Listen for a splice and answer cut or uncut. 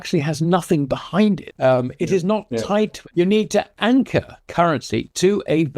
cut